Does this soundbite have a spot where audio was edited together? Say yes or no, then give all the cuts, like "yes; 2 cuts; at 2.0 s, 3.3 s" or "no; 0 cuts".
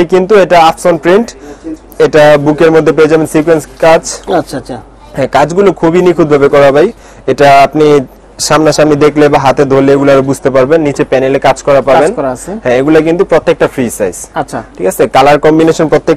no; 0 cuts